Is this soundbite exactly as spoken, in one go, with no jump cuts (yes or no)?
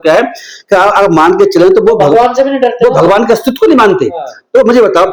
yes